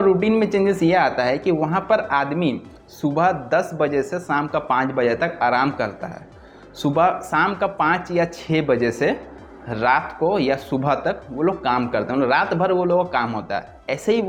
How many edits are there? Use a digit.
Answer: 0